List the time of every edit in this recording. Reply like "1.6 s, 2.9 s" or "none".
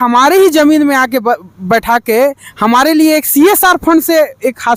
none